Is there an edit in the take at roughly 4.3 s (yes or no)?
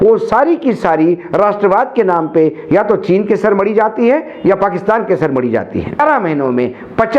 no